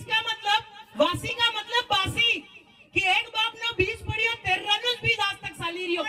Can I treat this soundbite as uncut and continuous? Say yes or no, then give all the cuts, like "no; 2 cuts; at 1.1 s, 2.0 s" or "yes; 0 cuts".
yes; 0 cuts